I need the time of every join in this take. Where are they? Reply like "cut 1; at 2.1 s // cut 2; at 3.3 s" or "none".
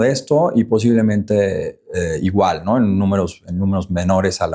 none